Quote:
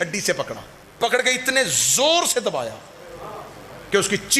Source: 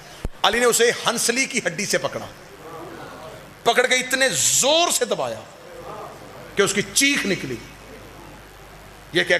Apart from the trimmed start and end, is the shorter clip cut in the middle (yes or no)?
yes